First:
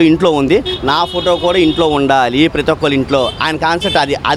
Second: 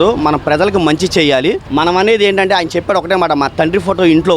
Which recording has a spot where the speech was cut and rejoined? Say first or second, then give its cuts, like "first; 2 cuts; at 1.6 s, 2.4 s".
second; 1 cut; at 1.6 s